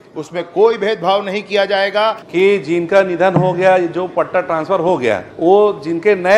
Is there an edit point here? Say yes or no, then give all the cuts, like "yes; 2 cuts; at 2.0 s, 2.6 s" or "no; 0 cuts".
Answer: yes; 2 cuts; at 2.2 s, 5.3 s